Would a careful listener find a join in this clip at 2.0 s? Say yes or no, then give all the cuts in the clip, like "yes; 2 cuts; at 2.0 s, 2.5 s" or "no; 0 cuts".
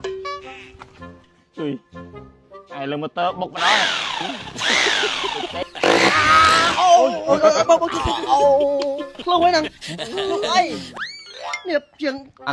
no; 1 cut; at 5.7 s